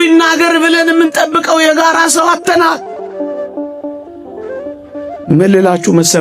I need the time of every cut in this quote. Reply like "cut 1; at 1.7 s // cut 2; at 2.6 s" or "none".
cut 1; at 2.8 s // cut 2; at 5.2 s